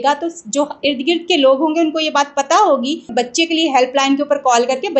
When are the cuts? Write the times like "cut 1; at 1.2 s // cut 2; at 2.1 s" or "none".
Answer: cut 1; at 3.1 s